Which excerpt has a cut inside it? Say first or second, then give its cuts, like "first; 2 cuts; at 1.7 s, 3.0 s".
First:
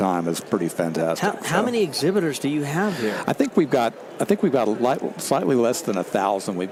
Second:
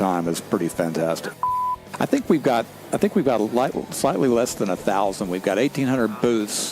second; 1 cut; at 1.5 s